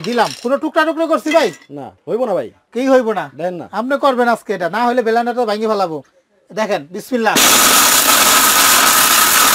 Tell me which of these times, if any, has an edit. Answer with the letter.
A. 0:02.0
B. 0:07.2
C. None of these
A